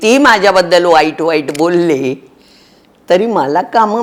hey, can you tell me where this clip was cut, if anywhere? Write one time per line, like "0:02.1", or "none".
none